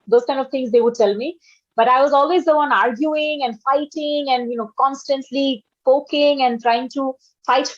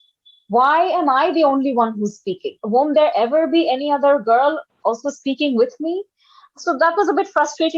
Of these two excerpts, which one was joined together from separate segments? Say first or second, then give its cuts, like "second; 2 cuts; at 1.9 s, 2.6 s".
second; 1 cut; at 2.5 s